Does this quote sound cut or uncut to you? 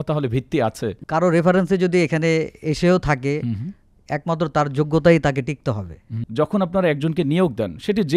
cut